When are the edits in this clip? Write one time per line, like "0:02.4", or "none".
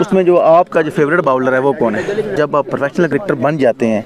0:02.3